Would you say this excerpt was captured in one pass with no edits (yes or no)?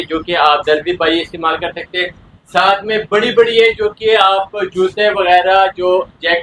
yes